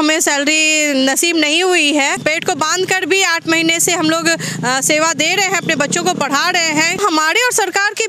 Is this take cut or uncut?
cut